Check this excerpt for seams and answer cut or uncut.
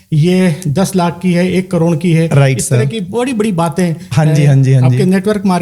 uncut